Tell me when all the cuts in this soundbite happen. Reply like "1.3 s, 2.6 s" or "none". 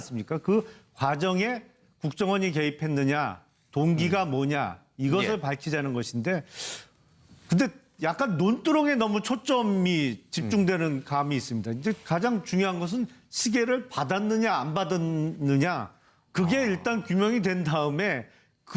11.1 s